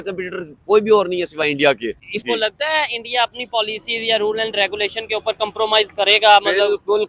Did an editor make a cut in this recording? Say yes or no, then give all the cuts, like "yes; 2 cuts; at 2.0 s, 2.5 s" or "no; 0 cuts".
yes; 1 cut; at 2.2 s